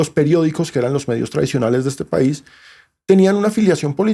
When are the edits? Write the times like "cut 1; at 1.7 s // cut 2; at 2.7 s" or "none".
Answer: none